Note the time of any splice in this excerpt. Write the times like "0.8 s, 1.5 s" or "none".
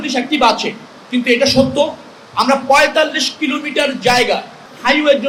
none